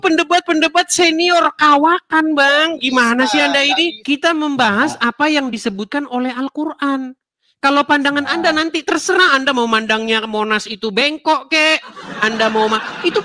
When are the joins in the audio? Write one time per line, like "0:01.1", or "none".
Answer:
0:04.0